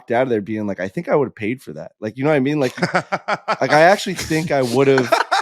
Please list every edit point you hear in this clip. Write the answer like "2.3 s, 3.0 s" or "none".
0.9 s